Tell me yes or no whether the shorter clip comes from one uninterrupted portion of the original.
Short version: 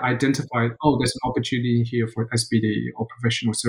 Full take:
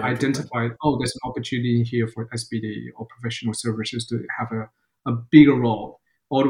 yes